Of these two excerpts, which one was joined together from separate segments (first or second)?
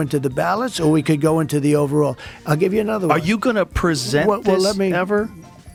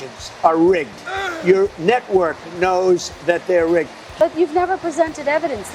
second